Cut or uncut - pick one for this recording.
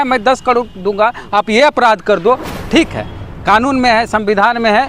cut